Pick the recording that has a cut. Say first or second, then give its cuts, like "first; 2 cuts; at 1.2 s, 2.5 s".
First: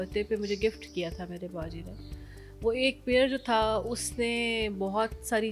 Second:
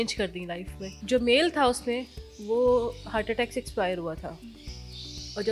second; 1 cut; at 0.9 s